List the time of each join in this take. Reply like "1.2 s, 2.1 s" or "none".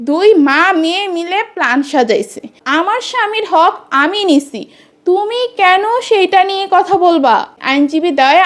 2.5 s, 7.6 s